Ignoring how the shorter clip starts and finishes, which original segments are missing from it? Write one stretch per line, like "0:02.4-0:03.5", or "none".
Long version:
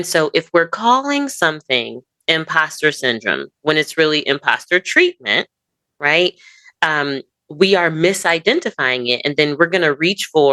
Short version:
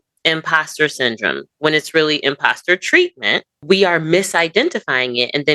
0:05.5-0:07.4